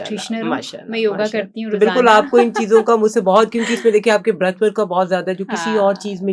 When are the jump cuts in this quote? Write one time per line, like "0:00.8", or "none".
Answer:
none